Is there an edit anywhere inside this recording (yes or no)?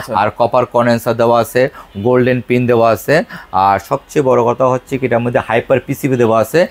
no